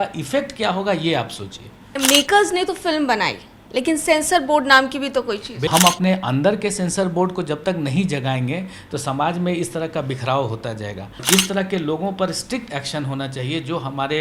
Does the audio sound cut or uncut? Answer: cut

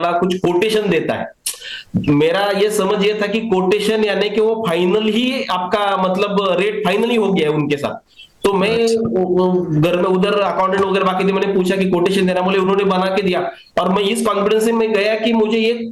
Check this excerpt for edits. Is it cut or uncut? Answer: uncut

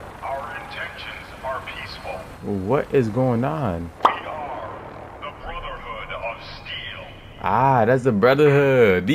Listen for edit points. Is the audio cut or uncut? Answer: cut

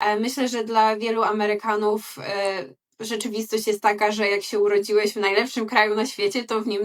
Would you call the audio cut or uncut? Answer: uncut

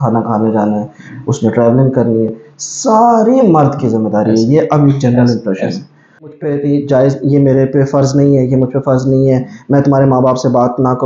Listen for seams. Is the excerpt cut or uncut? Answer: cut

